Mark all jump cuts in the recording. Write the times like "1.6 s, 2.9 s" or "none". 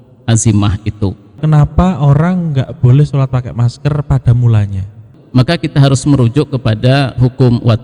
1.4 s, 5.1 s